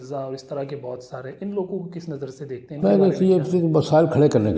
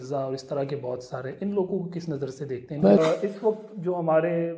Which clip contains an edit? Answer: second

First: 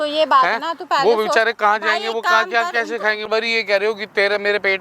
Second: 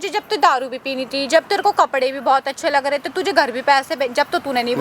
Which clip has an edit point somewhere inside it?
first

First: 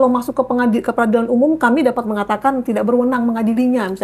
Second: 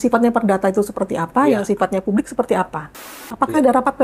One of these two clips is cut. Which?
second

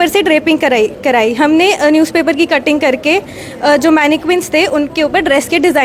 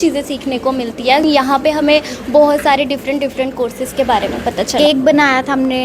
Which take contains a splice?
second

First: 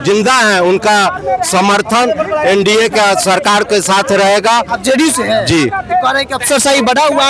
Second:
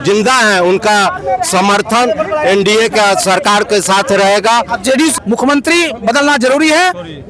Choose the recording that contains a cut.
second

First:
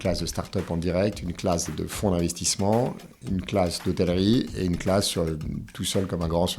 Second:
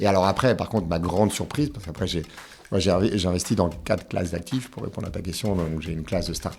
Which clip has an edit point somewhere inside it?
first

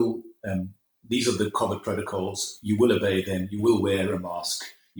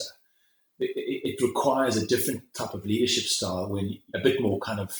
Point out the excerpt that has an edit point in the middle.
second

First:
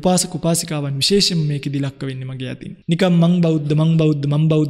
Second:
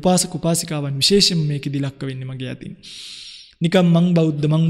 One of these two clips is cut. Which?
first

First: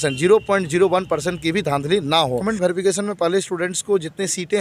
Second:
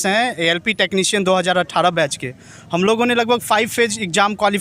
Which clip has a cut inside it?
first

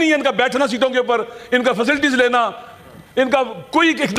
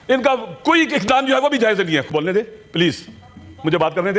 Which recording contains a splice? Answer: second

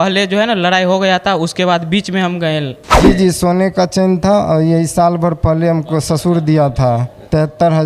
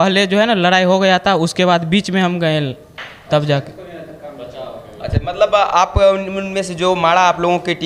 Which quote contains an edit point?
first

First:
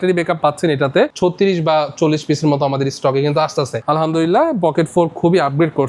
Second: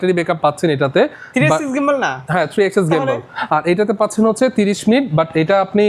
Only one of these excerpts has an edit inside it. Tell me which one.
first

